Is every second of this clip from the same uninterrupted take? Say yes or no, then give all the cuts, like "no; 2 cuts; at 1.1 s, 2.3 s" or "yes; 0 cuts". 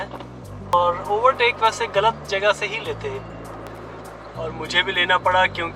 no; 2 cuts; at 0.7 s, 3.7 s